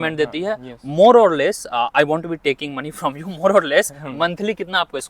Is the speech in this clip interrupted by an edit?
no; 0 cuts

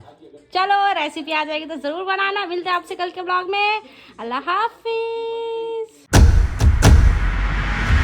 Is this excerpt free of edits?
yes; 0 cuts

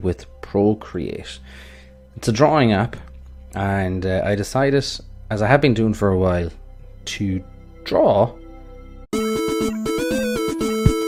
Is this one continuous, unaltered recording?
yes; 0 cuts

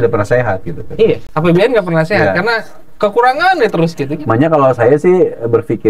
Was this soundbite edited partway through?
no; 0 cuts

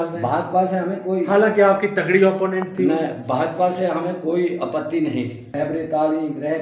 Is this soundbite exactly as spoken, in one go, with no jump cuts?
no; 1 cut; at 5.4 s

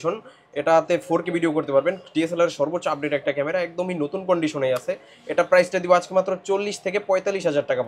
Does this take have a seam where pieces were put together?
no; 0 cuts

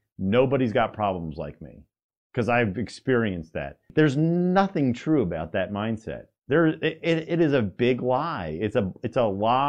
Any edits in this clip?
yes; 1 cut; at 3.8 s

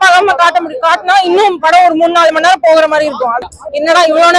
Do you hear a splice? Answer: yes; 1 cut; at 3.5 s

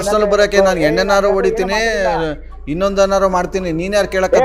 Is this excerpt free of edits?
yes; 0 cuts

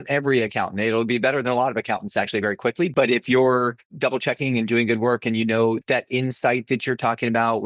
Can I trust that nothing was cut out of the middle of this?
no; 3 cuts; at 2.9 s, 3.9 s, 5.8 s

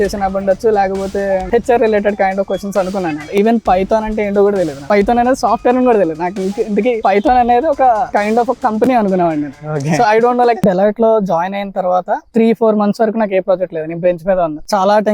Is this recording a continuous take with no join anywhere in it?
no; 2 cuts; at 3.2 s, 10.6 s

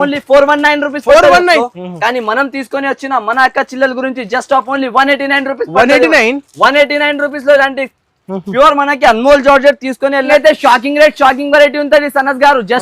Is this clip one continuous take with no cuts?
no; 2 cuts; at 1.7 s, 10.3 s

